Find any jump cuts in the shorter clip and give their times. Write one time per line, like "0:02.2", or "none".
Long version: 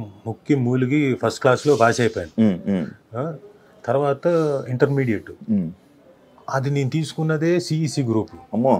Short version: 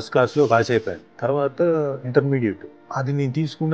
0:00.9
0:02.7